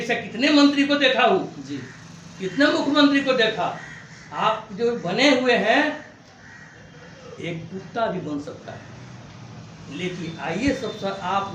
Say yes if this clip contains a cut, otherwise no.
no